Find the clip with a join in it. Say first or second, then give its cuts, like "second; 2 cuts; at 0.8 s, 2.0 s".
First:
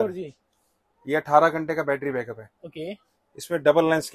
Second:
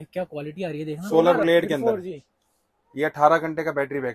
second; 1 cut; at 1.0 s